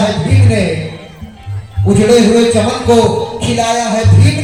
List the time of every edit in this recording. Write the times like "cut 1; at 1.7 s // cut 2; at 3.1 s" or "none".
none